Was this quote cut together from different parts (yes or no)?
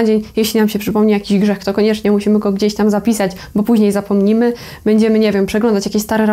no